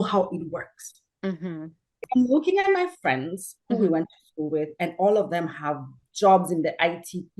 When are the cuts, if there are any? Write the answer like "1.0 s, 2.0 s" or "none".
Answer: 2.1 s